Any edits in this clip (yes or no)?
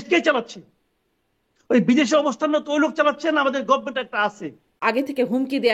yes